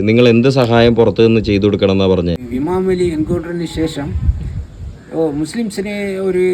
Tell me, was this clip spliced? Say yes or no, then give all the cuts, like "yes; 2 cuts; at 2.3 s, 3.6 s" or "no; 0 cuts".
yes; 1 cut; at 2.4 s